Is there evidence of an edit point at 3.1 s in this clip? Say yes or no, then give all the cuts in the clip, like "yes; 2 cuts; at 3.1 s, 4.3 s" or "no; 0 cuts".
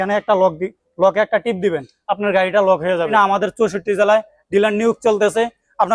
yes; 1 cut; at 3.1 s